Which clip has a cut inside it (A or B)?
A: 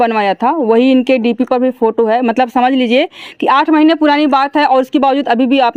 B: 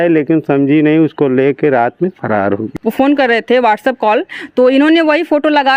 B